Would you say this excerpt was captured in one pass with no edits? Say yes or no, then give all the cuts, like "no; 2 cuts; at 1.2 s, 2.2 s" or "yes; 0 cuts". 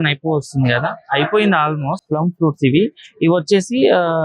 no; 1 cut; at 2.0 s